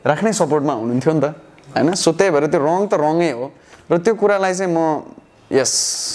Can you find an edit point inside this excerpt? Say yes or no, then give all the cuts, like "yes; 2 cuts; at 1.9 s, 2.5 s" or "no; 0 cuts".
no; 0 cuts